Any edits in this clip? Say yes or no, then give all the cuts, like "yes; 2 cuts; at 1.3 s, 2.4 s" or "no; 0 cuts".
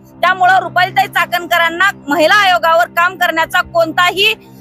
no; 0 cuts